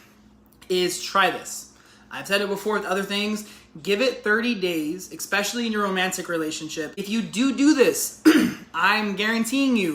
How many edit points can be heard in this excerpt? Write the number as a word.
one